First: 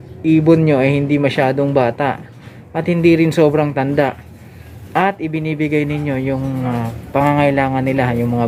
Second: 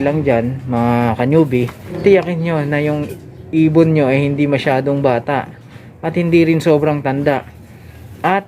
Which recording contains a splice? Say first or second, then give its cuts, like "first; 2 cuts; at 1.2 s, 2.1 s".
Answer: second; 1 cut; at 1.8 s